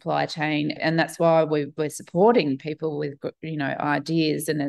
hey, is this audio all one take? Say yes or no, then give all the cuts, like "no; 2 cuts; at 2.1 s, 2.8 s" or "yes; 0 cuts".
yes; 0 cuts